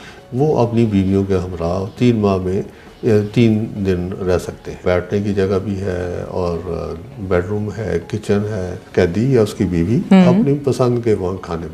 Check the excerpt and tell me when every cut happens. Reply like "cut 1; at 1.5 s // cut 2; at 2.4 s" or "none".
cut 1; at 1.9 s // cut 2; at 4.8 s // cut 3; at 8.8 s

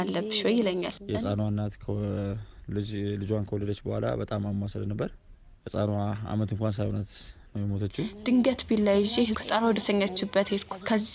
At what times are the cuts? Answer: cut 1; at 1.0 s // cut 2; at 8.1 s

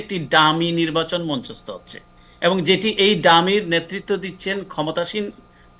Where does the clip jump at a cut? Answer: none

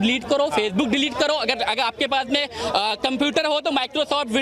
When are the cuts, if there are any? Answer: none

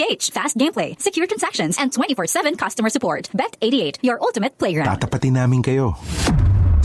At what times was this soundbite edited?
cut 1; at 4.8 s

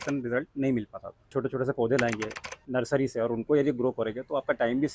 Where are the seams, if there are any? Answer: cut 1; at 1.3 s

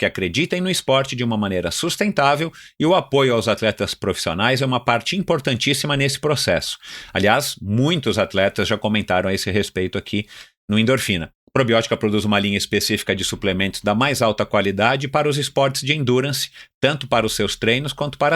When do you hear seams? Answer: cut 1; at 11.3 s

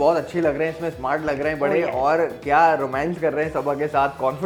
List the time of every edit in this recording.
none

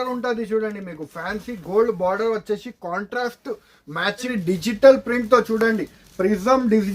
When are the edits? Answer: cut 1; at 4.3 s

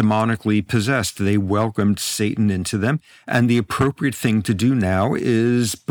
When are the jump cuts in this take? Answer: none

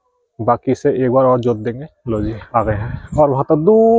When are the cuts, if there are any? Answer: cut 1; at 1.9 s

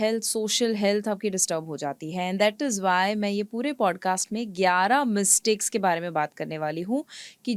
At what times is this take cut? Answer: none

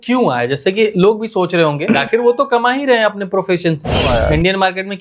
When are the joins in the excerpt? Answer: cut 1; at 2.0 s // cut 2; at 4.0 s

